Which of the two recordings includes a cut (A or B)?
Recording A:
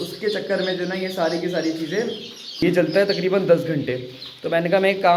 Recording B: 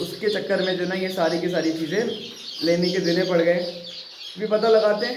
A